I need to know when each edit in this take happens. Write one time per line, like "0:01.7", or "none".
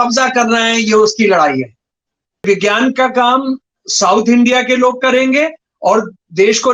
0:02.4